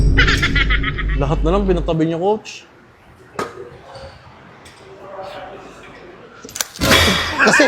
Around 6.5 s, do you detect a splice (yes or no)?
no